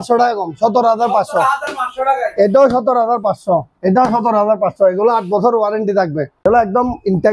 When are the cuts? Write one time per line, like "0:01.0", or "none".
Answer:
0:06.3